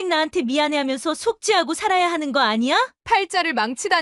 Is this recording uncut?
no; 1 cut; at 3.0 s

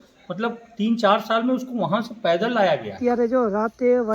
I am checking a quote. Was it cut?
yes; 1 cut; at 3.0 s

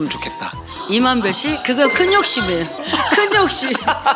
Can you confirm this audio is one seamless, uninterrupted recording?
yes; 0 cuts

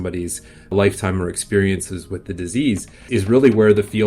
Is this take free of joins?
no; 2 cuts; at 0.7 s, 3.0 s

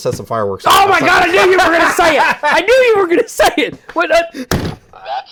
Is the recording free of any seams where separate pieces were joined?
yes; 0 cuts

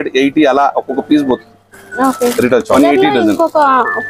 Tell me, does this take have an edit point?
yes; 1 cut; at 2.7 s

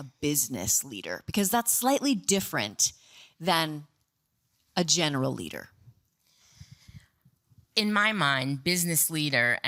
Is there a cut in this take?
no; 0 cuts

